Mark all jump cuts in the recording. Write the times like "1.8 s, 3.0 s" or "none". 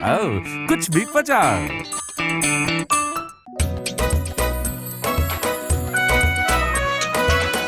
none